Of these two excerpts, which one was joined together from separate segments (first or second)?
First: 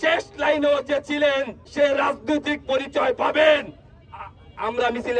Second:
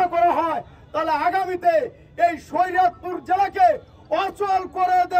first